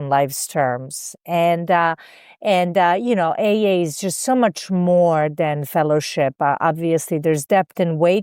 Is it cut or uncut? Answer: uncut